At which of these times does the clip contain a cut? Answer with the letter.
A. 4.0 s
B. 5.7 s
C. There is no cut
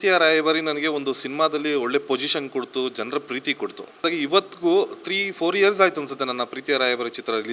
A